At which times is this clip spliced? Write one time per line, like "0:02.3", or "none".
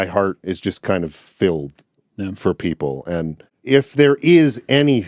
0:03.6

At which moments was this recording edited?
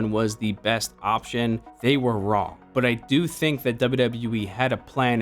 0:01.7
0:02.6

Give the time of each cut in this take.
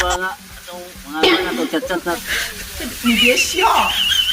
0:02.2

